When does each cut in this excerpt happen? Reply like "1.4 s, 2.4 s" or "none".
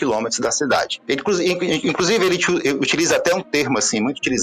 0.9 s